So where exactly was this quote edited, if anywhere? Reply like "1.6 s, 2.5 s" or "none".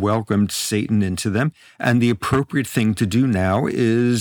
none